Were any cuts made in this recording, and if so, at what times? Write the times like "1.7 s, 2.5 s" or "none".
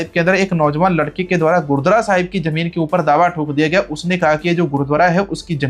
none